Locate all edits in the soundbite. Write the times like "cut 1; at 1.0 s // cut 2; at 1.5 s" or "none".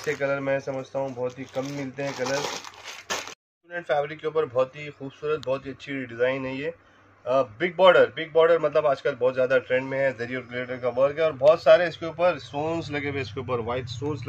cut 1; at 3.4 s